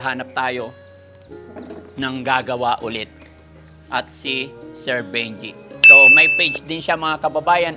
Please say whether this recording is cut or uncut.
uncut